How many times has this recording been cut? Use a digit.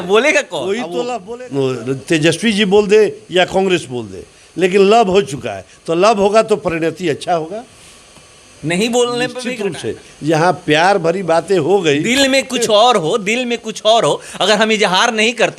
2